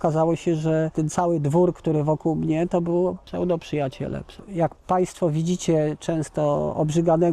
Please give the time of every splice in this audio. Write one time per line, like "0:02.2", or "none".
0:00.9
0:03.2
0:04.3